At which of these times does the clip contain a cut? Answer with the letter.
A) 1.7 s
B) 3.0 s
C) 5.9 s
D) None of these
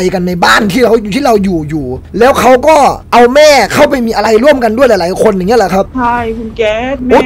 C